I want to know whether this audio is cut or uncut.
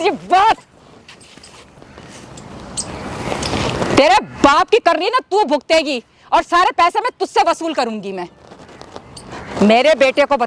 uncut